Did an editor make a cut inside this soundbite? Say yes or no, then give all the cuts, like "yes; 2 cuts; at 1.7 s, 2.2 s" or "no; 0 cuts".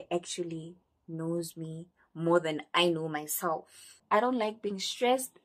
yes; 1 cut; at 4.0 s